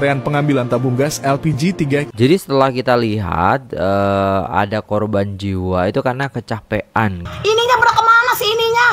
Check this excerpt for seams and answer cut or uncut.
cut